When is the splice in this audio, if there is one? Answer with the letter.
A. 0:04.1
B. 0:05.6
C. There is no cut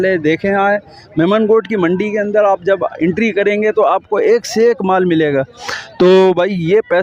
C